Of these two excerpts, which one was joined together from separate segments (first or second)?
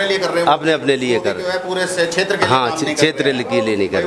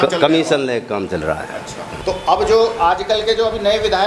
second